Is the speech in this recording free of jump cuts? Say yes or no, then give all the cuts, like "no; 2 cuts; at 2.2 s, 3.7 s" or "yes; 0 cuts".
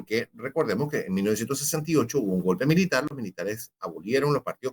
yes; 0 cuts